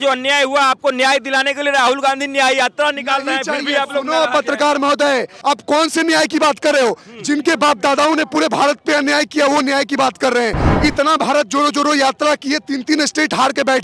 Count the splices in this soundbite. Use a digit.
2